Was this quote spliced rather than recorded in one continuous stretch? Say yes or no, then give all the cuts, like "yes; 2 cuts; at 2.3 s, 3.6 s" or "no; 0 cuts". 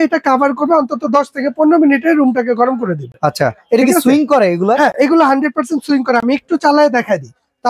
no; 0 cuts